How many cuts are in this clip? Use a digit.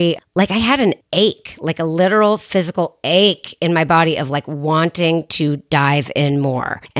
0